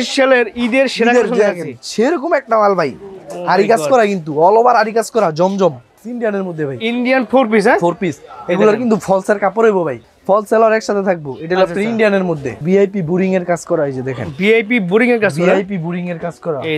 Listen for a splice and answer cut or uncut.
cut